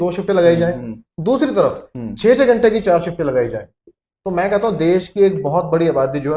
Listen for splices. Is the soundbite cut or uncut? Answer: uncut